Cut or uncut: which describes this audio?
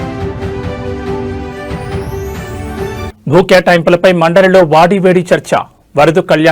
cut